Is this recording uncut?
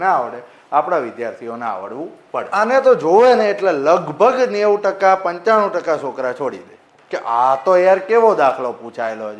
no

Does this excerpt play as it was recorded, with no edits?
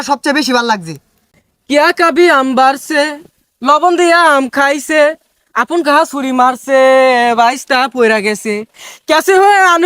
no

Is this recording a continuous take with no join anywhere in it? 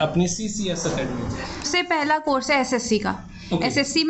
no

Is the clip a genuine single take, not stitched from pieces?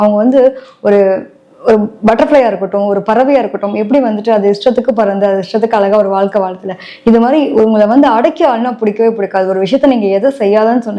yes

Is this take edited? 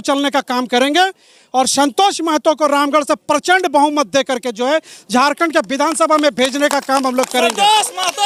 no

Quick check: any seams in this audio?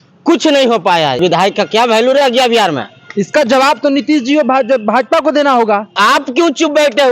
yes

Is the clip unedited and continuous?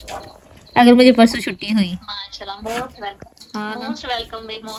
yes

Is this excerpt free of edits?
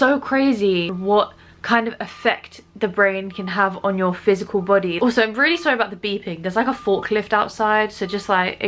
no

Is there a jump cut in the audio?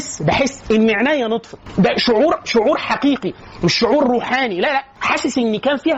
no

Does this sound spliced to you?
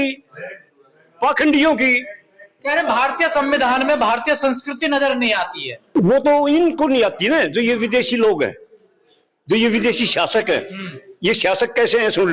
yes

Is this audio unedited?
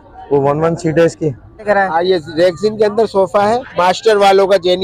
no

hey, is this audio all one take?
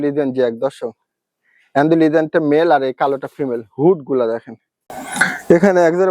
no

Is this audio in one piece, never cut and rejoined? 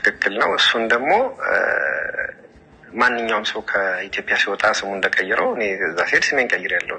yes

